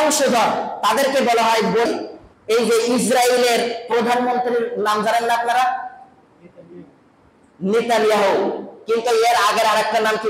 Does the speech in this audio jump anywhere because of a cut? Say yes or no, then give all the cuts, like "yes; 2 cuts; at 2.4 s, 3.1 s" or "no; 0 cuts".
yes; 1 cut; at 1.9 s